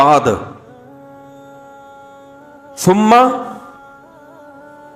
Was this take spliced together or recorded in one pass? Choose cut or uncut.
cut